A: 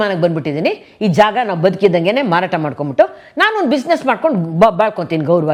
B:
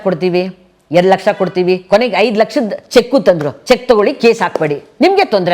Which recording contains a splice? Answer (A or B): B